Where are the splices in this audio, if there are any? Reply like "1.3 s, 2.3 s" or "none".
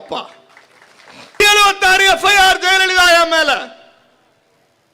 1.4 s